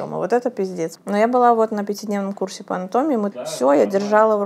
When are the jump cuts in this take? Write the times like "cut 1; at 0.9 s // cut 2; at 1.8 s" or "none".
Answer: cut 1; at 1.0 s // cut 2; at 3.4 s